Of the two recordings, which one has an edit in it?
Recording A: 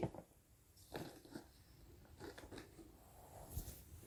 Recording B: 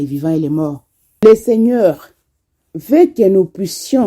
B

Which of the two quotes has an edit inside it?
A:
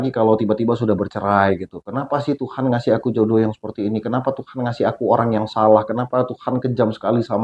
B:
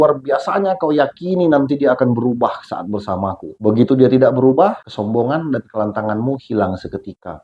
B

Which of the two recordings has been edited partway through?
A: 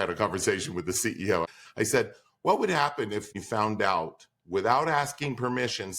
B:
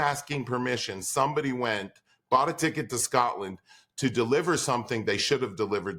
A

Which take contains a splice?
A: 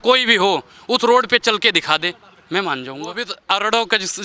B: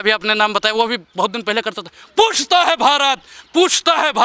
A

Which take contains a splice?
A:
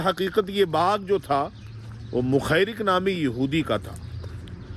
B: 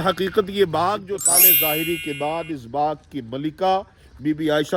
B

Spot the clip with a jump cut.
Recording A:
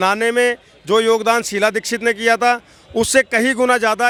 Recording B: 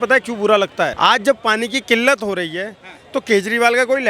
B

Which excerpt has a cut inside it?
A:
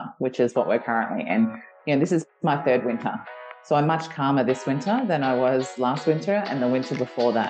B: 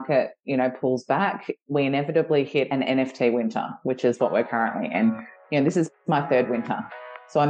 B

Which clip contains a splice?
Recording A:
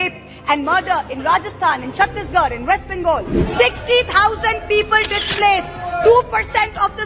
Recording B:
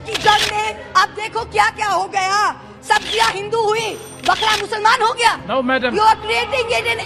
A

